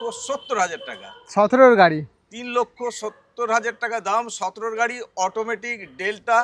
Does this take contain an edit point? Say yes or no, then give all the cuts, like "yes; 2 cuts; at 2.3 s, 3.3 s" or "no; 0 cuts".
no; 0 cuts